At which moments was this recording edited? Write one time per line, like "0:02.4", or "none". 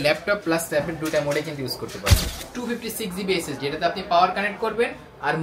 0:02.3